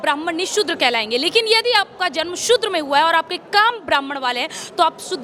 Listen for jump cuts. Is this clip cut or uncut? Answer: uncut